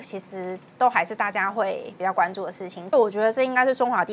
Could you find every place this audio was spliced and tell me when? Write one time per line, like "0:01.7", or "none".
0:02.9